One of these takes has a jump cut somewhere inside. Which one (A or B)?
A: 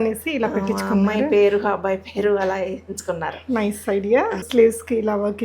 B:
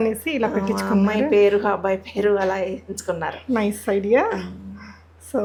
A